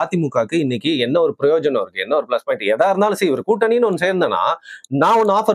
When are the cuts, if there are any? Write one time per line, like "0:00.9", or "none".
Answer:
none